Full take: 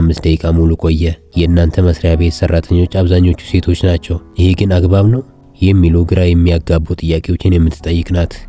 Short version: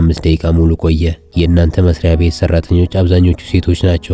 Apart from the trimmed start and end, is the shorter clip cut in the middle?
no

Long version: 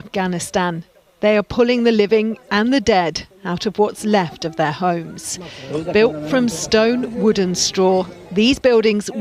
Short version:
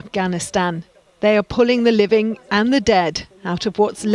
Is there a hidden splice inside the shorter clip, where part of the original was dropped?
no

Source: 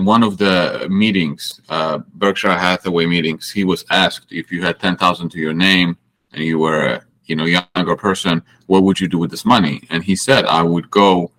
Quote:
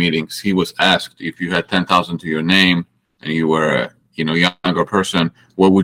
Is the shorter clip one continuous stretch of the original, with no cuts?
yes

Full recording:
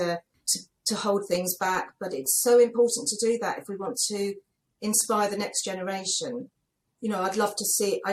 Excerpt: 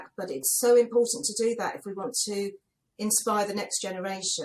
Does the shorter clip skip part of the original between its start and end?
no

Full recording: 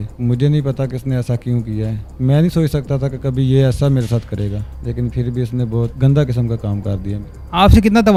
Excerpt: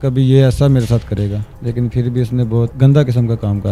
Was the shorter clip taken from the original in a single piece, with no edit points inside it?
yes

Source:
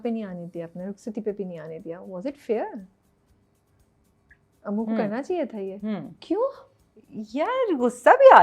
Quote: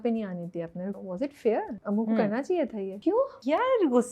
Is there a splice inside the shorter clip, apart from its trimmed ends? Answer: yes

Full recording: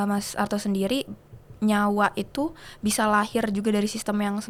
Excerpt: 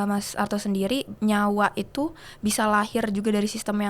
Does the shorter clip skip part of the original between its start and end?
yes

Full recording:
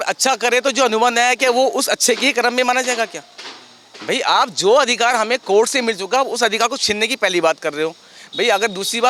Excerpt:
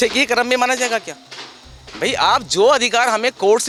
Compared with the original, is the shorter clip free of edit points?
yes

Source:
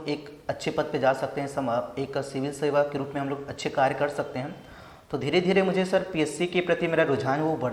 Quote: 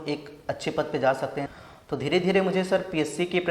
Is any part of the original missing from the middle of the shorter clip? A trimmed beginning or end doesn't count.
yes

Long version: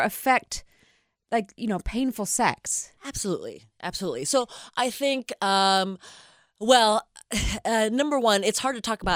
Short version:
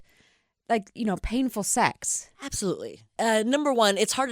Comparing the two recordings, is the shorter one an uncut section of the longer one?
no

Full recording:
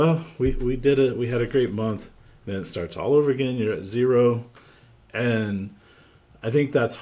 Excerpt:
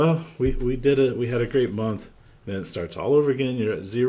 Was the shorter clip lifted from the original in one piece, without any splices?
yes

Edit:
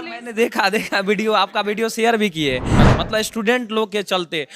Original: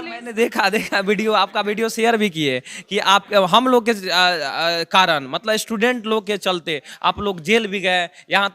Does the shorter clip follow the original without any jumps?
no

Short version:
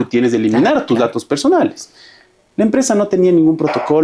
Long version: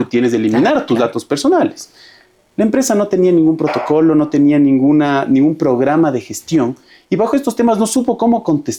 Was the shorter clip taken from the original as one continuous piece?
yes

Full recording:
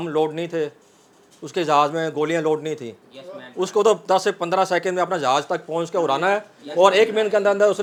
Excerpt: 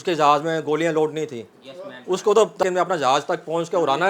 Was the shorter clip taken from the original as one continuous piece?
no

